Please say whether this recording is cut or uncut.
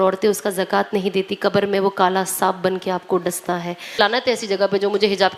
cut